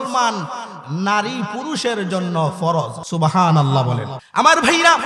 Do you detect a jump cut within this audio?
yes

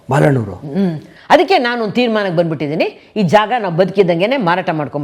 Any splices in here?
yes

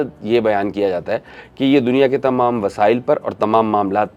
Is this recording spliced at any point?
no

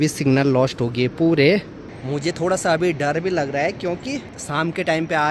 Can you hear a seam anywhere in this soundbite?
yes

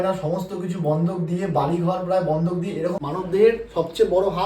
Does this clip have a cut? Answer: yes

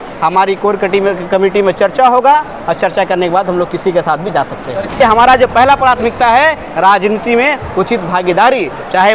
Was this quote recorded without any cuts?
no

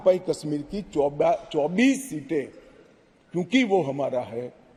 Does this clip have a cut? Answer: no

